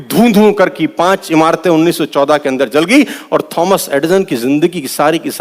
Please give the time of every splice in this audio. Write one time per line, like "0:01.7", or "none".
none